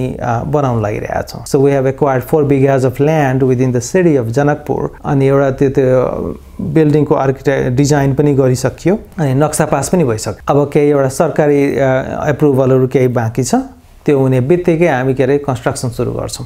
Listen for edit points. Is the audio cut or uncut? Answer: uncut